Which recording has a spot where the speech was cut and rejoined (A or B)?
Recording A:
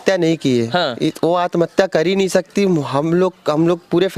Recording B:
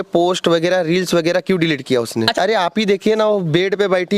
B